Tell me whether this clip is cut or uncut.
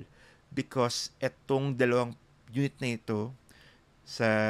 uncut